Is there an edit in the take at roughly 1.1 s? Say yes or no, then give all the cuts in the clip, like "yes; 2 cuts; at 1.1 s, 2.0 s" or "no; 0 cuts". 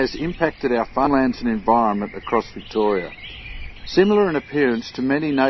yes; 1 cut; at 1.1 s